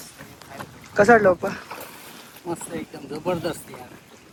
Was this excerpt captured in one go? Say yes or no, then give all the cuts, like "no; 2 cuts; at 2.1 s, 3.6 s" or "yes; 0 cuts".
yes; 0 cuts